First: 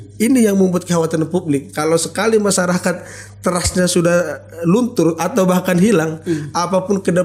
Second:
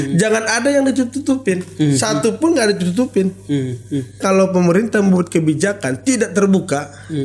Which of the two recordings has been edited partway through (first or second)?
second